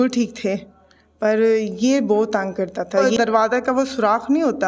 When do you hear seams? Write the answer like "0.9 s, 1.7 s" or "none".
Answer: 3.1 s